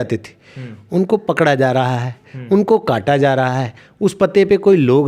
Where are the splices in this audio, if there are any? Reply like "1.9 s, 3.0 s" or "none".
none